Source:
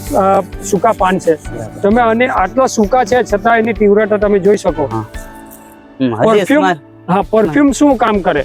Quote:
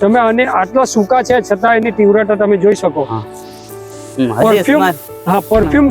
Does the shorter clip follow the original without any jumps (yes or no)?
yes